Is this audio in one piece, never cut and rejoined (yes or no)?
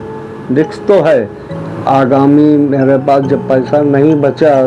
no